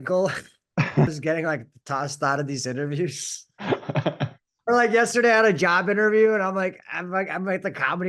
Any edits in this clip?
yes; 1 cut; at 1.1 s

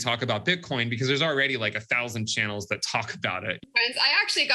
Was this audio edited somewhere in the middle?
yes; 1 cut; at 3.6 s

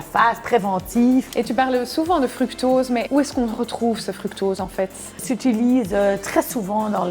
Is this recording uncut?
no; 3 cuts; at 1.3 s, 3.1 s, 5.2 s

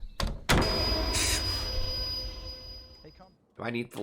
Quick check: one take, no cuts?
no; 1 cut; at 3.0 s

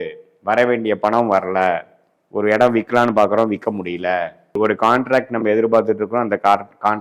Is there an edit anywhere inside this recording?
no; 0 cuts

